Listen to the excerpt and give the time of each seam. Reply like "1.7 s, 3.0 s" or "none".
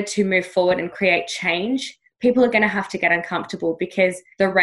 none